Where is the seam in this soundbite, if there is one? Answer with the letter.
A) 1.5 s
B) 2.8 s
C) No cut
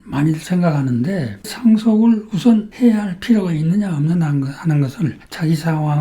A